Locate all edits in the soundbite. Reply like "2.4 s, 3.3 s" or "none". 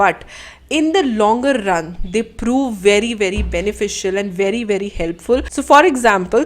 5.6 s